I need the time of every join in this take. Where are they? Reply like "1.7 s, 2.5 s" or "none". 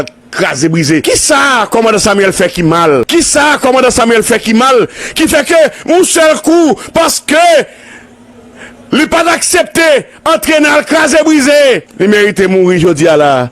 1.0 s, 3.1 s, 11.9 s